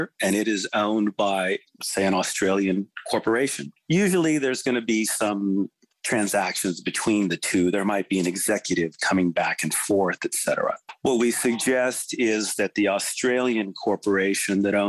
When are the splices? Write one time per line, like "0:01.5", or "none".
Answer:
0:03.7
0:10.9